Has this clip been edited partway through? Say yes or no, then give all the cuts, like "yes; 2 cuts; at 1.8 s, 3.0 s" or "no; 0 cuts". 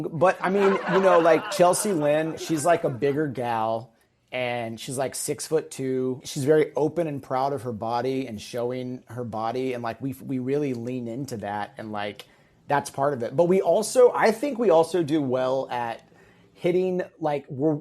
yes; 2 cuts; at 2.4 s, 6.3 s